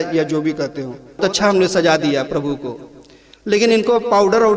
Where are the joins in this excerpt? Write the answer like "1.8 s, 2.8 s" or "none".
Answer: 1.2 s